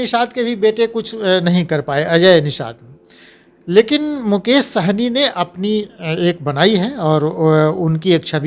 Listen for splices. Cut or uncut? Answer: uncut